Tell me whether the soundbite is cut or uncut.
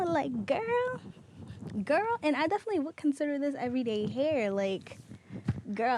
uncut